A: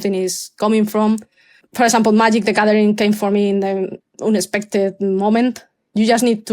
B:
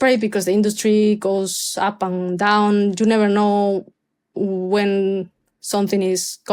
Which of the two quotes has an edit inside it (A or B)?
A